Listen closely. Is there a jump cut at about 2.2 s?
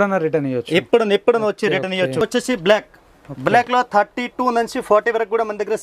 yes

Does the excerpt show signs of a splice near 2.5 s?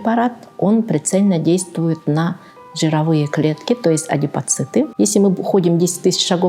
no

